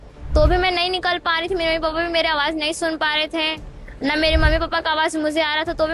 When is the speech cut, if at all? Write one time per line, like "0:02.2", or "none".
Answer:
none